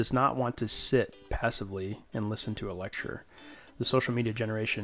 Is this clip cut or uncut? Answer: uncut